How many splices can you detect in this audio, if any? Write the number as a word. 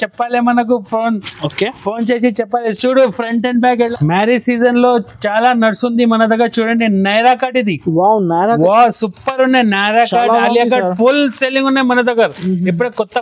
one